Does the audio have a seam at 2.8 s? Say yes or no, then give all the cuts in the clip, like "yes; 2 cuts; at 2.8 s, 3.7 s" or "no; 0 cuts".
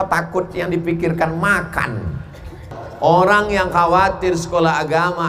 yes; 1 cut; at 2.8 s